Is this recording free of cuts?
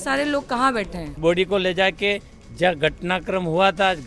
no; 1 cut; at 1.0 s

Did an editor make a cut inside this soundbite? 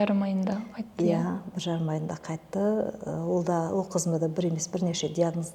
no; 0 cuts

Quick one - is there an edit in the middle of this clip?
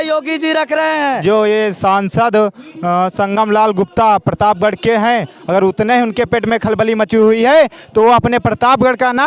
yes; 1 cut; at 1.2 s

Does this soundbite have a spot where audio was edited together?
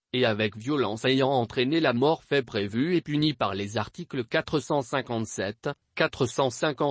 yes; 1 cut; at 1.9 s

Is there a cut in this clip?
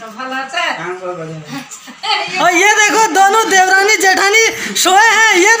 no; 0 cuts

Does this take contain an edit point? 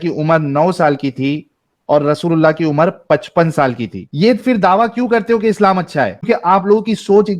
yes; 2 cuts; at 4.1 s, 6.2 s

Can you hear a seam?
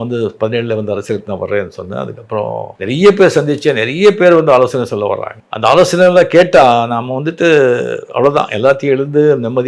no; 0 cuts

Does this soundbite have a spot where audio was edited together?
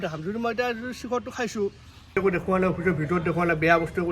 yes; 1 cut; at 2.2 s

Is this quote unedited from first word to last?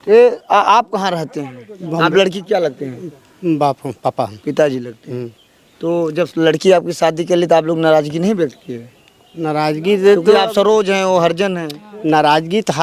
yes; 0 cuts

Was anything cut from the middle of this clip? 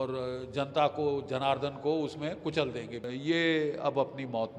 yes; 1 cut; at 3.1 s

